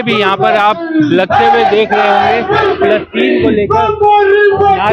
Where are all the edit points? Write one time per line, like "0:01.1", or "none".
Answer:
none